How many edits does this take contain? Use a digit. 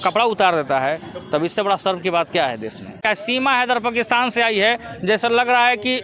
1